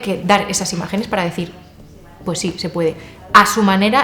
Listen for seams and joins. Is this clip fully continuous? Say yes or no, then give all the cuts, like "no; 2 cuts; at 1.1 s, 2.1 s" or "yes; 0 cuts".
yes; 0 cuts